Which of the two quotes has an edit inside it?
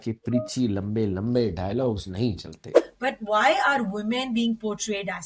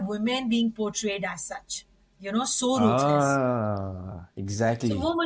first; 1 cut; at 2.7 s

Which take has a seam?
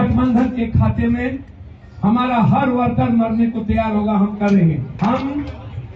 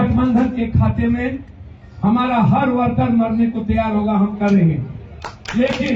first; 1 cut; at 4.9 s

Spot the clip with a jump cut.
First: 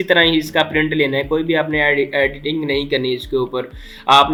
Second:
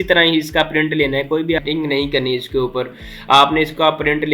second; 1 cut; at 1.6 s

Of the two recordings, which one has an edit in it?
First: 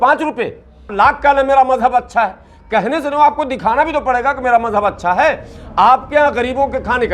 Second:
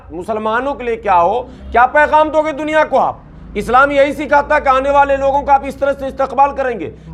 first; 1 cut; at 0.9 s

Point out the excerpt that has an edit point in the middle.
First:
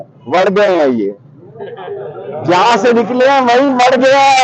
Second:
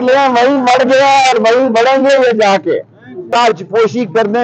second; 1 cut; at 3.2 s

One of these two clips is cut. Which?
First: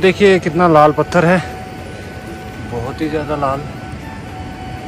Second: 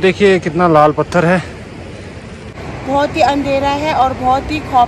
second; 1 cut; at 2.7 s

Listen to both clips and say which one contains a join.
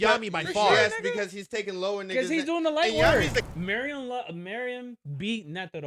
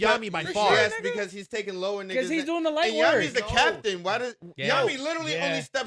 first; 1 cut; at 3.5 s

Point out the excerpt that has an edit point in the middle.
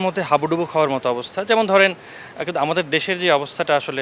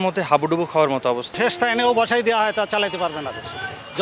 second; 1 cut; at 1.3 s

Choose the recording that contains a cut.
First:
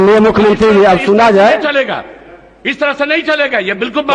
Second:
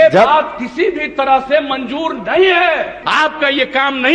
second; 1 cut; at 3.0 s

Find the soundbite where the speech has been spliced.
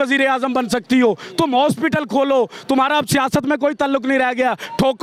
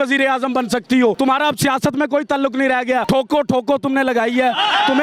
second; 2 cuts; at 1.2 s, 3.0 s

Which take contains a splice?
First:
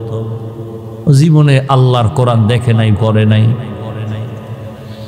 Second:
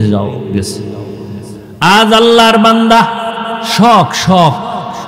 second; 1 cut; at 1.6 s

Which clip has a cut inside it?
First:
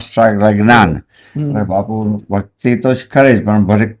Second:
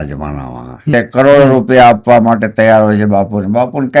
second; 1 cut; at 0.9 s

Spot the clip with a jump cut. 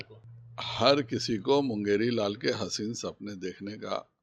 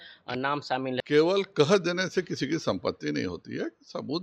second; 1 cut; at 1.0 s

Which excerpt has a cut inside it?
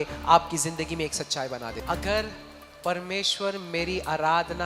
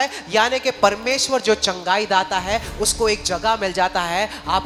first; 1 cut; at 1.8 s

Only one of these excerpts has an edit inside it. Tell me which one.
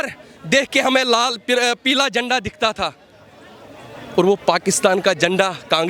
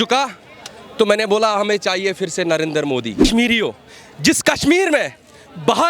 second; 1 cut; at 3.3 s

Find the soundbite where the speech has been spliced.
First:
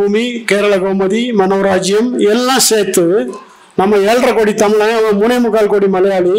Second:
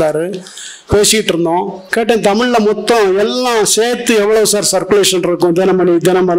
second; 1 cut; at 1.8 s

